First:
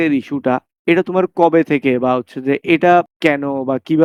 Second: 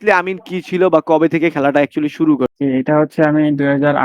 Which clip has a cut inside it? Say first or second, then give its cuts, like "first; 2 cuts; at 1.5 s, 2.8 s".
second; 1 cut; at 2.5 s